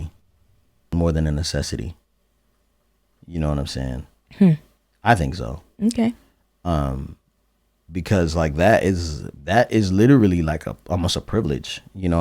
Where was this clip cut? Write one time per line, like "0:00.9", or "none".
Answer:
0:00.9